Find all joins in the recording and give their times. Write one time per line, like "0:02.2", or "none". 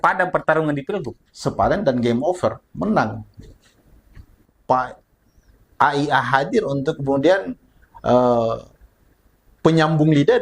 0:04.4